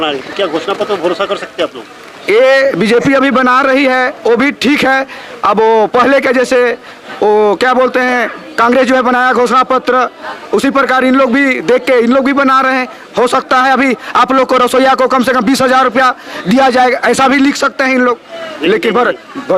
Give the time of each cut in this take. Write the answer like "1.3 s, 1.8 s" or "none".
none

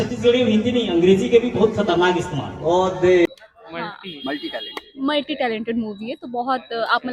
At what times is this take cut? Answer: 3.3 s

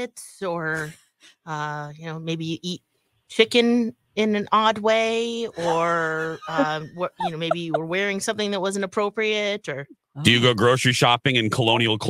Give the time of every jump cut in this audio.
none

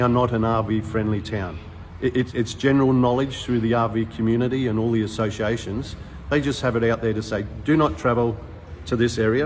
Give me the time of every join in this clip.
none

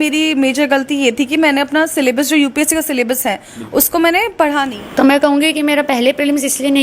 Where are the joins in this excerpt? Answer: 4.8 s

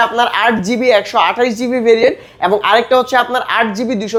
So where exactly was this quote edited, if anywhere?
none

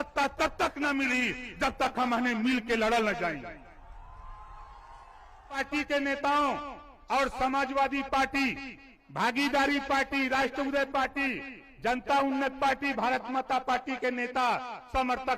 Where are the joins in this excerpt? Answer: 5.6 s

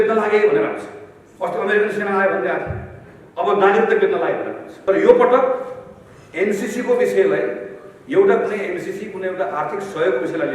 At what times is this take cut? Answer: 4.7 s

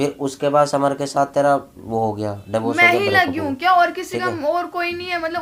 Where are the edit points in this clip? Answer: none

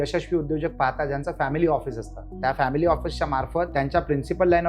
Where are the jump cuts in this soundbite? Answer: 3.7 s

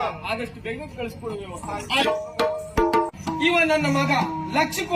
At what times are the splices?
3.1 s

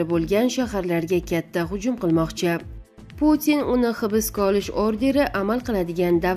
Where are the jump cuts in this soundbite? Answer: 2.8 s

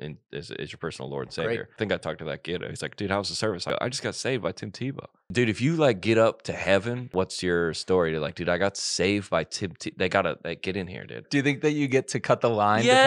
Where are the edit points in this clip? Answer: 1.7 s, 3.6 s, 5.3 s, 7.1 s, 11.2 s

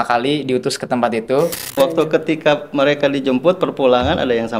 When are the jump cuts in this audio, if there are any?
1.7 s

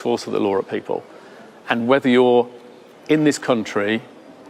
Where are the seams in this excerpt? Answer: none

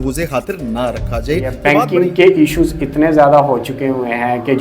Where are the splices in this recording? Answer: 1.6 s

